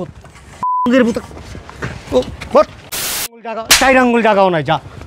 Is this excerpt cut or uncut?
cut